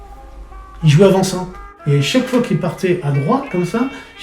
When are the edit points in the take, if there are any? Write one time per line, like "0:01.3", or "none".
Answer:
0:01.7